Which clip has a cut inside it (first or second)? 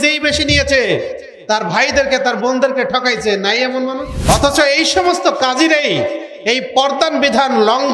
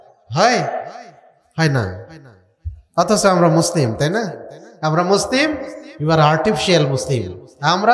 first